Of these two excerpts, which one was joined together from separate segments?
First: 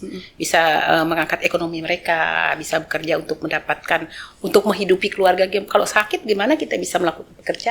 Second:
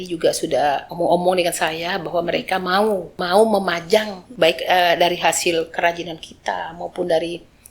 second; 3 cuts; at 0.9 s, 3.1 s, 4.2 s

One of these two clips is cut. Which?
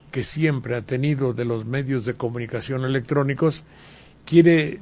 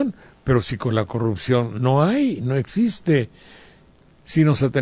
second; 1 cut; at 3.4 s

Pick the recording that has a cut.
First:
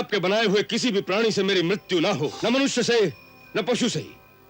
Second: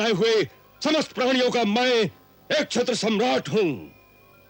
first; 1 cut; at 2.3 s

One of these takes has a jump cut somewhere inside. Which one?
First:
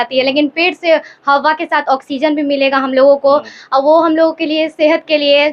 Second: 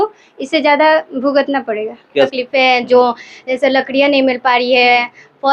second; 1 cut; at 2.3 s

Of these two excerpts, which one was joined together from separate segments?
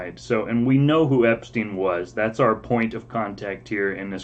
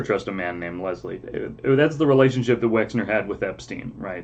second; 1 cut; at 1.2 s

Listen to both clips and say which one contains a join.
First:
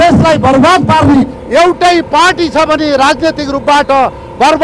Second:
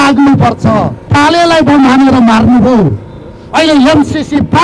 second; 1 cut; at 1.1 s

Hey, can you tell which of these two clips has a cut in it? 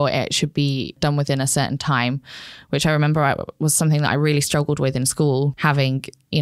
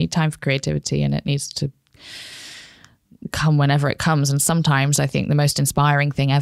first; 2 cuts; at 0.9 s, 5.5 s

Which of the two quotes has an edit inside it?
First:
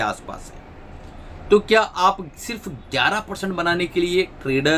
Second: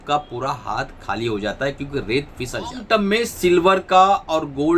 second; 1 cut; at 2.8 s

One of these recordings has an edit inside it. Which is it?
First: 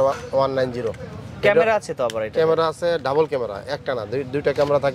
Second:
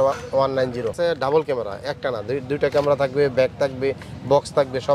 second; 1 cut; at 0.9 s

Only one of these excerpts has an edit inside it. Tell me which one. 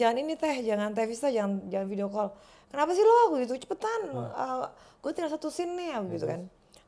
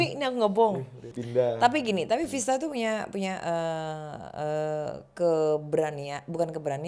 second; 1 cut; at 1.1 s

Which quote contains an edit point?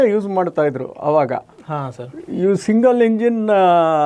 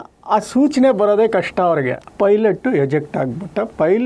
second; 1 cut; at 2.0 s

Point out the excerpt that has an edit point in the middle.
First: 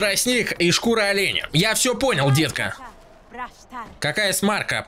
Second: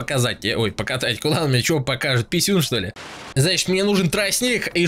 second; 1 cut; at 3.1 s

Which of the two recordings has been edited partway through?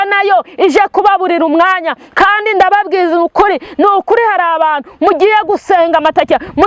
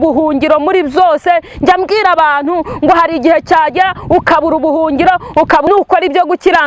second; 1 cut; at 5.7 s

